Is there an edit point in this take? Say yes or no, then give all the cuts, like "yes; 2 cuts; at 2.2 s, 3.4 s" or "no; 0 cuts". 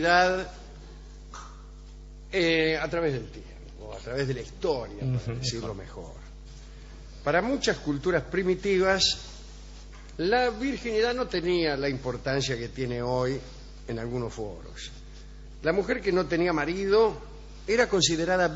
no; 0 cuts